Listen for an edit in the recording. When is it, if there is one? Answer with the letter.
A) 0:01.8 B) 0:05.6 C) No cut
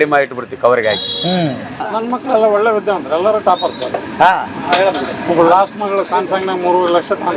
A